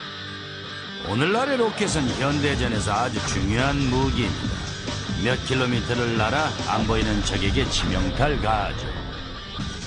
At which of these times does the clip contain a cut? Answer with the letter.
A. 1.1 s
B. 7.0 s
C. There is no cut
C